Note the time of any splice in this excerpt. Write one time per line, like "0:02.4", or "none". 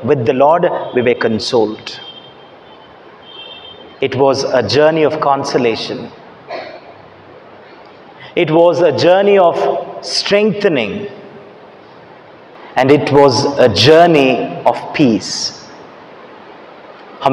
0:12.6